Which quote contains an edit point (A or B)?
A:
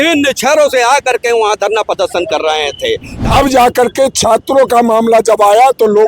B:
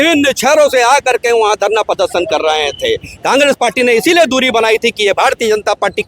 A